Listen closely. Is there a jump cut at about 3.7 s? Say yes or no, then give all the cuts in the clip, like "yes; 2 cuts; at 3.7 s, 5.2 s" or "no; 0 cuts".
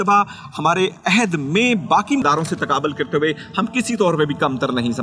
no; 0 cuts